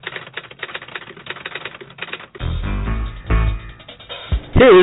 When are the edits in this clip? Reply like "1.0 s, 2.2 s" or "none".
2.4 s, 3.5 s